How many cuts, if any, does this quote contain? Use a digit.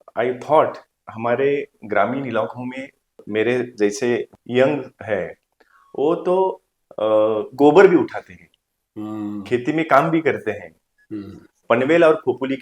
4